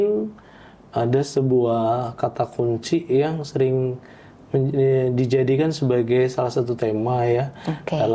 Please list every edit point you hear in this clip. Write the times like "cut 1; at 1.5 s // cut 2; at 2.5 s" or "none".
none